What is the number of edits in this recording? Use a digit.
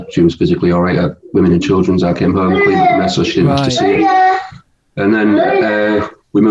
0